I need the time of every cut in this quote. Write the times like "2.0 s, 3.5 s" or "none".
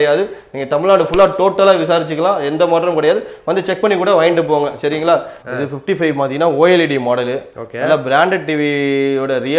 5.4 s